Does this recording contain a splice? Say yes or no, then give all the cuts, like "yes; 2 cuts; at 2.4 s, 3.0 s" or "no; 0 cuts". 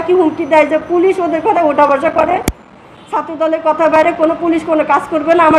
no; 0 cuts